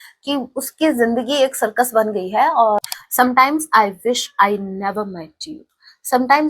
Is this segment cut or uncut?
cut